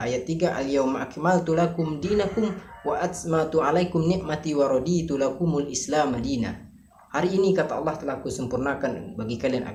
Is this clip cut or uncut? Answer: uncut